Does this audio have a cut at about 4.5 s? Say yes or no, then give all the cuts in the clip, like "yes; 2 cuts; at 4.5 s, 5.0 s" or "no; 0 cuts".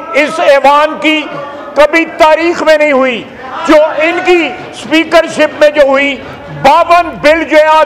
no; 0 cuts